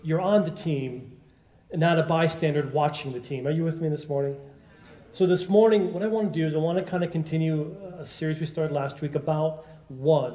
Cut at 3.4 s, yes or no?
no